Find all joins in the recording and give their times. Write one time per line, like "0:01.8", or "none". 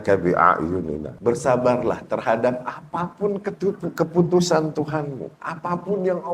0:01.1